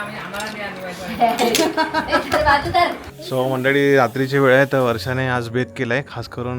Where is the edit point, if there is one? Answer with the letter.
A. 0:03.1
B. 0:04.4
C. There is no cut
A